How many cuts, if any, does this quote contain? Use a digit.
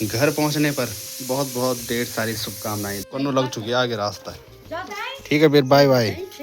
2